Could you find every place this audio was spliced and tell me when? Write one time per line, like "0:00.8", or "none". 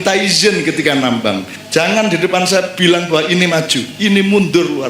0:01.5
0:02.7